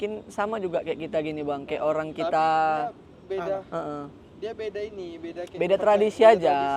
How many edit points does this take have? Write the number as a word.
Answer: zero